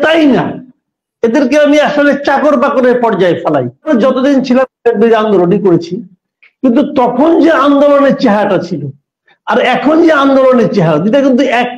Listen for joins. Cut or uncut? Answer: cut